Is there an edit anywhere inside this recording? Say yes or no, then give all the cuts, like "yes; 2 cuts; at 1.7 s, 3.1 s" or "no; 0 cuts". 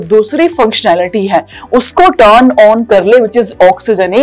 no; 0 cuts